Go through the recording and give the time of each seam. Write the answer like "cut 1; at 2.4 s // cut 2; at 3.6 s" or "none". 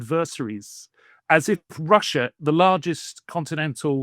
cut 1; at 2.3 s